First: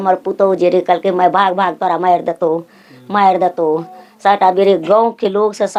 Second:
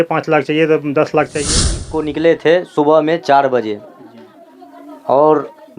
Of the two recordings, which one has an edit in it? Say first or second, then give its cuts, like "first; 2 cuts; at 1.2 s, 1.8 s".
second; 1 cut; at 1.9 s